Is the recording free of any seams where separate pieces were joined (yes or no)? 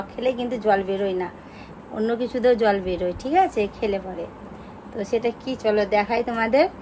yes